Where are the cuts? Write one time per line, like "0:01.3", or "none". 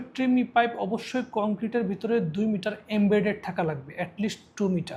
none